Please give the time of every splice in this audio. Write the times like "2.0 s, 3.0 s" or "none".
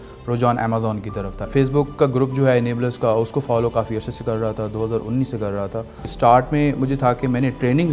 1.5 s, 6.1 s